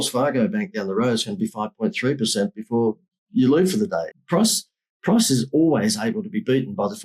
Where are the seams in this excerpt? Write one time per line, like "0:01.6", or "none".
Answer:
0:03.1
0:04.1